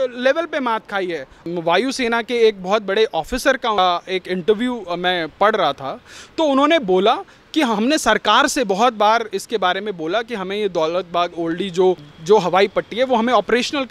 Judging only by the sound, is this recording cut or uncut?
cut